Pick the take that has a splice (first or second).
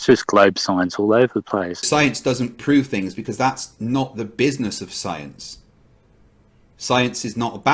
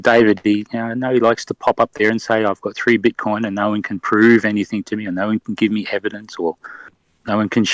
first